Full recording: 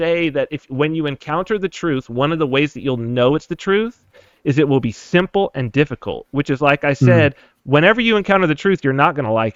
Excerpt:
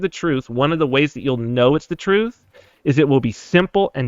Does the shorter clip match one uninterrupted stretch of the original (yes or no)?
yes